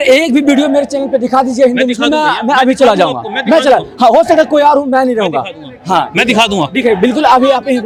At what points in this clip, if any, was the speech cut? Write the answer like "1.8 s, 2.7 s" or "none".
none